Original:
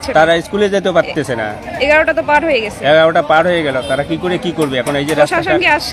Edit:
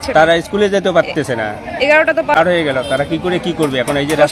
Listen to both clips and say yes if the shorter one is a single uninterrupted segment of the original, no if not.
no